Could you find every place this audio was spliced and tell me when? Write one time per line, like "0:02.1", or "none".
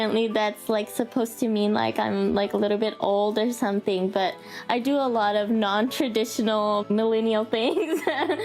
0:06.8